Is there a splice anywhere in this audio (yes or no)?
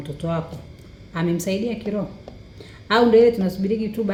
no